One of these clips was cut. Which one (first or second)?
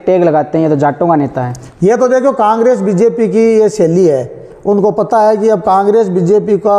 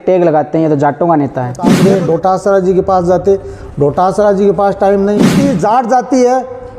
second